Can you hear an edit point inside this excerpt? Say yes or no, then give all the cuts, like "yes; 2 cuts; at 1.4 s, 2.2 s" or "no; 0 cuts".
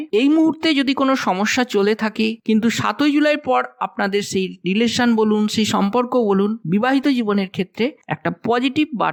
no; 0 cuts